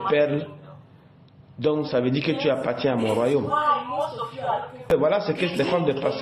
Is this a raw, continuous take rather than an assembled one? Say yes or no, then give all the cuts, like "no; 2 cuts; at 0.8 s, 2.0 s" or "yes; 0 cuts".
no; 1 cut; at 4.9 s